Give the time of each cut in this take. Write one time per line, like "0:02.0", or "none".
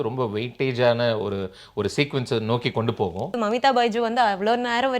0:03.4